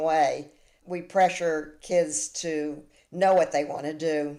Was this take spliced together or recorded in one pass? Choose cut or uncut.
uncut